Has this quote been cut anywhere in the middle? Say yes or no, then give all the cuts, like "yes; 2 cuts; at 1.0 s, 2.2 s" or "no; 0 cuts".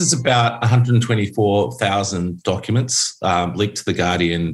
no; 0 cuts